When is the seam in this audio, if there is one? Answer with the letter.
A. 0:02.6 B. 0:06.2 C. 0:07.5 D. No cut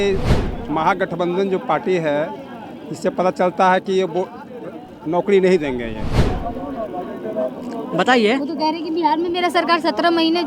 B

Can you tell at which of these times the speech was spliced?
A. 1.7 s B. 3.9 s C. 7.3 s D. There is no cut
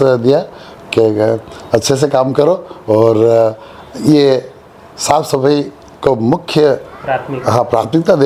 D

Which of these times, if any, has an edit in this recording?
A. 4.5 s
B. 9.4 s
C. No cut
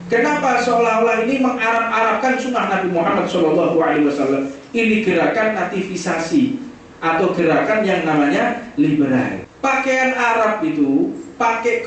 B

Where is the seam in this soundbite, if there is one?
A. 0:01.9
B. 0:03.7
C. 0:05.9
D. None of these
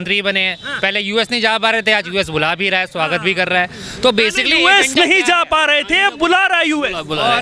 D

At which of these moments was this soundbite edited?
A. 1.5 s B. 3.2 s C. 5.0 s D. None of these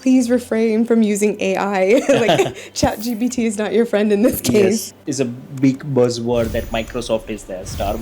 C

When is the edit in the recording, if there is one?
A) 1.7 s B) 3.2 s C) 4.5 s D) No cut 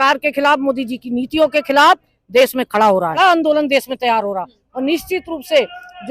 B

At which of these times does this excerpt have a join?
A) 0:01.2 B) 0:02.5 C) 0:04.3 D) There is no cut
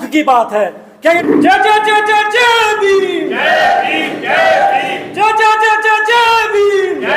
A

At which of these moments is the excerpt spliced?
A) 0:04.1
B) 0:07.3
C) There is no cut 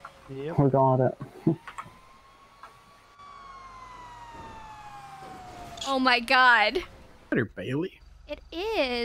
B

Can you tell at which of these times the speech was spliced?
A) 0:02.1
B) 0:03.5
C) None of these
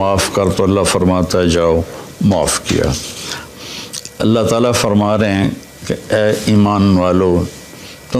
B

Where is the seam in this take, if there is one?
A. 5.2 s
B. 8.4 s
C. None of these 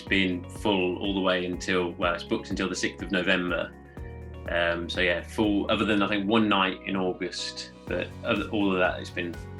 C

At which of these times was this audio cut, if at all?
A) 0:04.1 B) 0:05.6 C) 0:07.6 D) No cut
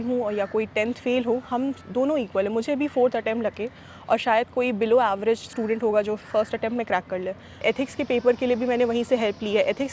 C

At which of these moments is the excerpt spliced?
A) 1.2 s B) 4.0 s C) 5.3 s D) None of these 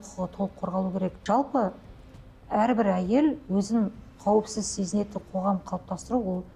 A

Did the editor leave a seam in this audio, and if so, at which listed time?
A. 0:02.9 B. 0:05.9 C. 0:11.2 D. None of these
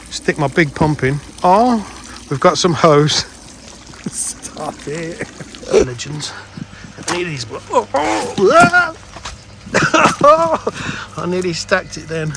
B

